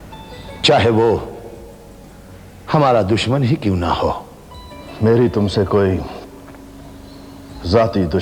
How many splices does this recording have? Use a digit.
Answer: 0